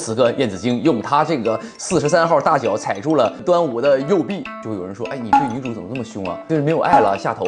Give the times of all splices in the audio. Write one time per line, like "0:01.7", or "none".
0:04.6
0:06.4